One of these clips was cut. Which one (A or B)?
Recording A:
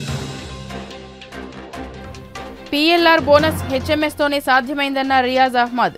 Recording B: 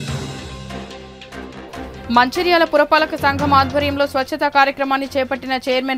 A